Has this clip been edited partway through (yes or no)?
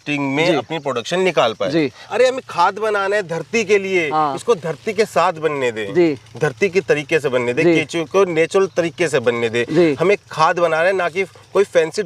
yes